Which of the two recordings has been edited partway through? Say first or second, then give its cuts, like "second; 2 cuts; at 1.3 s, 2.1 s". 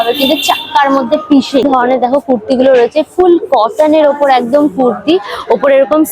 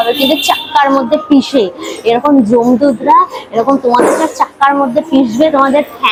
first; 1 cut; at 1.6 s